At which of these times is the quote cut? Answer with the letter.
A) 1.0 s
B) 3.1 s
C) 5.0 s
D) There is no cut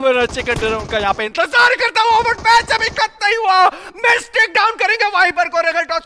D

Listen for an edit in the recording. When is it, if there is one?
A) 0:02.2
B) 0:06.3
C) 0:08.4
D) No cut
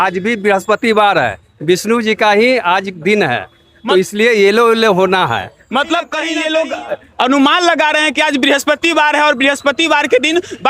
B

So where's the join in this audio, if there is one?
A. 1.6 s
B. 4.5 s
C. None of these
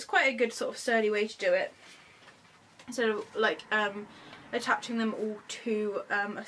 A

